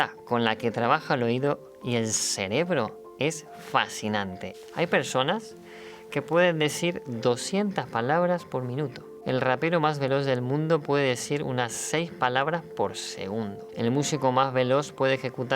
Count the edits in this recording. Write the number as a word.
two